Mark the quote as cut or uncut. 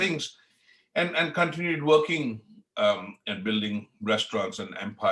uncut